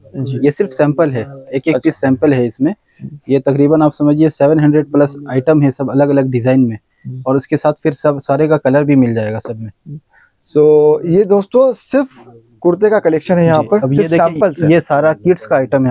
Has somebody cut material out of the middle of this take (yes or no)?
no